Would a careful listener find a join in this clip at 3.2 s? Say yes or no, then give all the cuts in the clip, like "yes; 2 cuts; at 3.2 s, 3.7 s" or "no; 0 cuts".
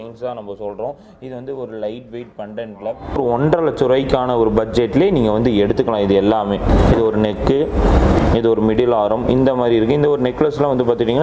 yes; 2 cuts; at 3.2 s, 6.7 s